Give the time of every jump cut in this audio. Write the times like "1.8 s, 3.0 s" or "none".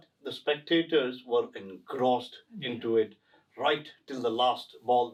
none